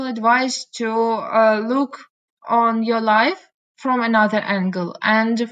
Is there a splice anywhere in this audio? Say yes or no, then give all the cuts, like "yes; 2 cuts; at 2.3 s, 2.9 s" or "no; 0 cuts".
no; 0 cuts